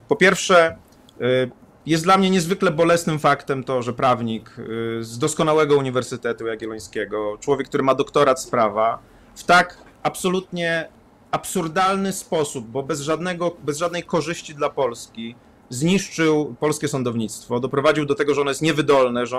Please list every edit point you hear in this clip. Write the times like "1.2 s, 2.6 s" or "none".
none